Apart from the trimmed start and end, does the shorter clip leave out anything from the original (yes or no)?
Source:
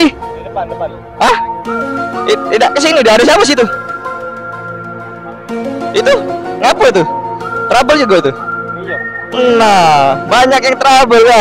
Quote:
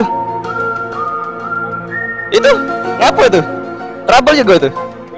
no